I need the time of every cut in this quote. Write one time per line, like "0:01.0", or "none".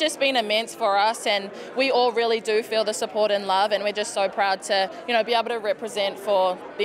none